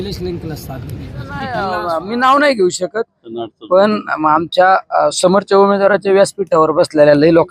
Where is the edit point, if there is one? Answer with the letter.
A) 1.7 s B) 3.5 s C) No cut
A